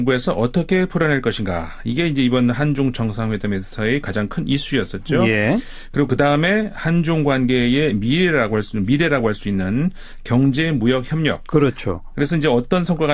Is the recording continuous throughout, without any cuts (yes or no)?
yes